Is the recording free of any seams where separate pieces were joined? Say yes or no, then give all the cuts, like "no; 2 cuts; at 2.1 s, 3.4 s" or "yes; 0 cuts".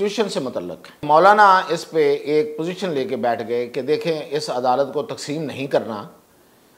no; 1 cut; at 1.0 s